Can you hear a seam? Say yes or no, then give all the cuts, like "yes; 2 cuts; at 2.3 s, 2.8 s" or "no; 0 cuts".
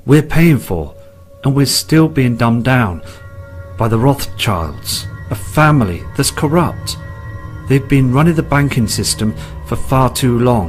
no; 0 cuts